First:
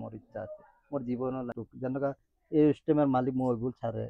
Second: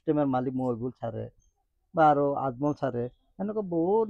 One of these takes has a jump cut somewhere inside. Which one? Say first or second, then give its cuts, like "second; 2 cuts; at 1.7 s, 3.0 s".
first; 1 cut; at 1.6 s